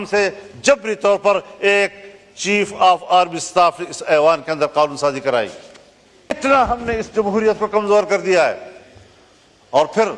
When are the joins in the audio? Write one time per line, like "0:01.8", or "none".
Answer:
0:06.3